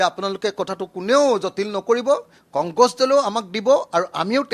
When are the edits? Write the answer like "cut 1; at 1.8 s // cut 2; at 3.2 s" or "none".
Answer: none